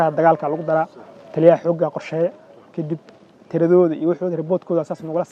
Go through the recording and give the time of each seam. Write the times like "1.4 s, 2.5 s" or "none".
none